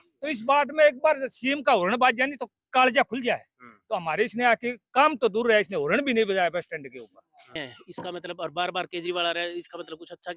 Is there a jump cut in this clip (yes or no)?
yes